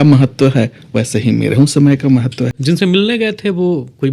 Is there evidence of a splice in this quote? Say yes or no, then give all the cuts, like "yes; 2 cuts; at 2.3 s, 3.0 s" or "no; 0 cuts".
no; 0 cuts